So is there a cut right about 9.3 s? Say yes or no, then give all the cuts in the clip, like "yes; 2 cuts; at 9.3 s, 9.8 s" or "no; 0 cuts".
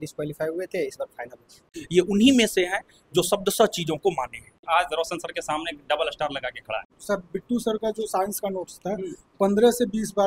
no; 3 cuts; at 1.8 s, 4.6 s, 6.9 s